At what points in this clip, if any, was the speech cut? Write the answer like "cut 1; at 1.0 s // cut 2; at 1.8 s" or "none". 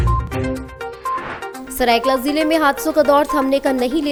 none